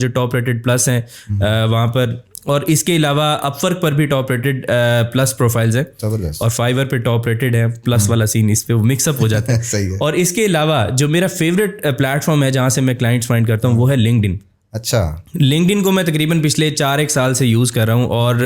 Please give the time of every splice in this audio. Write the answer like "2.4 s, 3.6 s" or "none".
none